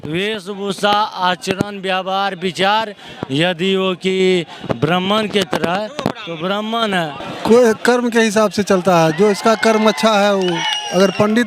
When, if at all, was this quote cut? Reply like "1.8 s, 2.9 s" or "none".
none